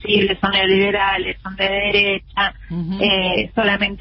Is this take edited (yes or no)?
no